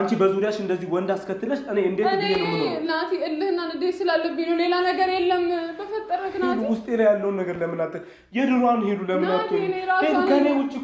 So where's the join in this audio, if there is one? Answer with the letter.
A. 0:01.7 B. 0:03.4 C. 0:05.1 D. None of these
D